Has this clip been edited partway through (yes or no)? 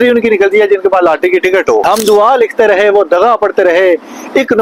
no